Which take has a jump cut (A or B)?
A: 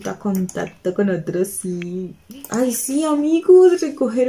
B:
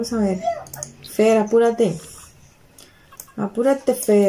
A